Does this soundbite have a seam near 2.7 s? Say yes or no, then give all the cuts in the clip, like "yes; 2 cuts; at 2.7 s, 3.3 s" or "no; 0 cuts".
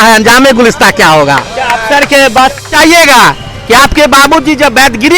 yes; 1 cut; at 2.7 s